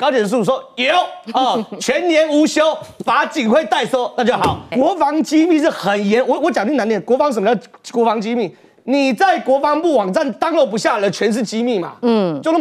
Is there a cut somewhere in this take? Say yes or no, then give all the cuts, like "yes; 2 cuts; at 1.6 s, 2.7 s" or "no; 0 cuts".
yes; 1 cut; at 4.7 s